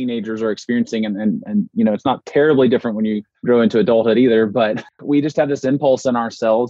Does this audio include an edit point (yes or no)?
yes